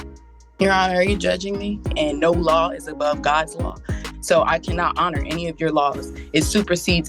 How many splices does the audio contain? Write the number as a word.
one